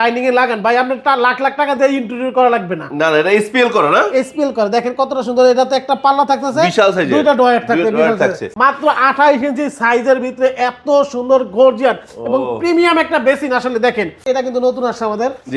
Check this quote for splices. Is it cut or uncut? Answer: cut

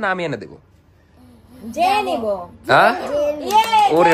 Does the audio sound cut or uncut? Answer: uncut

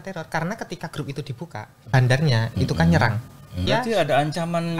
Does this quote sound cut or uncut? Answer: cut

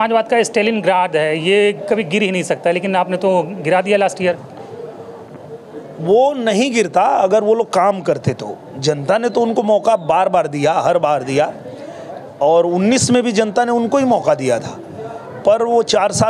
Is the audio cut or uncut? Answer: uncut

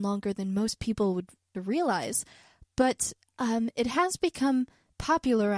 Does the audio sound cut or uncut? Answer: uncut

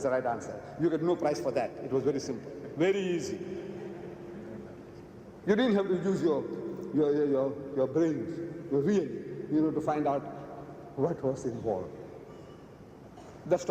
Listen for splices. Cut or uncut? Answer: cut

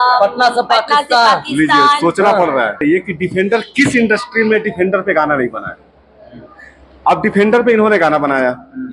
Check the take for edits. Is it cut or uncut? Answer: cut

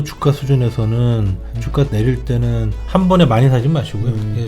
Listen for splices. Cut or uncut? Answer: uncut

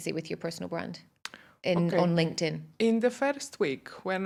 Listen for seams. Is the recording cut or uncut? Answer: uncut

